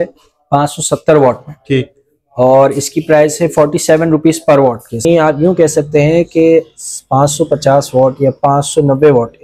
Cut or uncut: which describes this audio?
cut